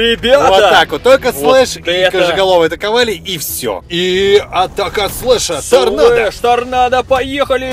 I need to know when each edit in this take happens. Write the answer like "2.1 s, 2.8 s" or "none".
3.8 s